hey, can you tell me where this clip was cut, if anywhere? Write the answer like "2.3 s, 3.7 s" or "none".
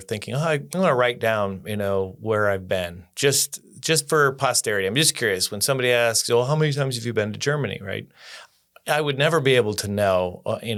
none